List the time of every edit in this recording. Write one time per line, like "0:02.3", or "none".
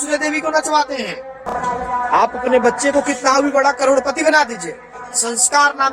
0:01.3